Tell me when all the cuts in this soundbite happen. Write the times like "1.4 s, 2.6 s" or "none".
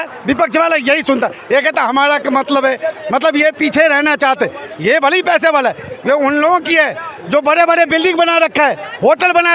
none

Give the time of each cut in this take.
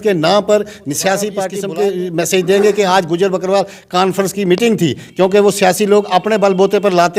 1.5 s

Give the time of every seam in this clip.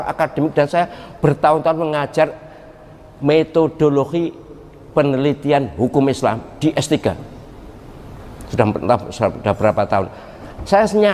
none

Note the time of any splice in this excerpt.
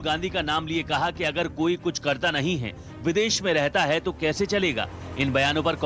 2.2 s

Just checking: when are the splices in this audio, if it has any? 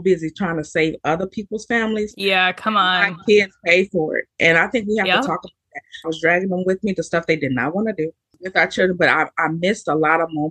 3.2 s, 6.1 s, 8.4 s

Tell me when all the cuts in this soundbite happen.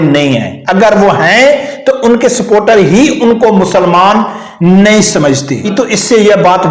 5.7 s

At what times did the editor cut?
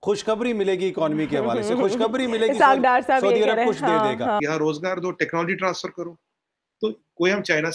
4.4 s

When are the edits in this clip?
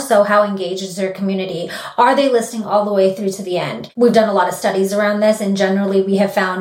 3.8 s

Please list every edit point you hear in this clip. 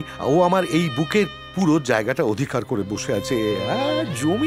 none

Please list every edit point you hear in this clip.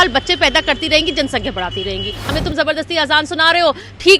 2.3 s

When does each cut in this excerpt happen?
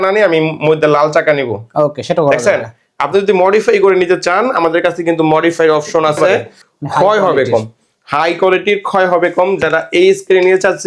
6.2 s

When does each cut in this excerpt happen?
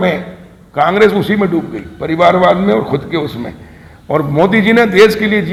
none

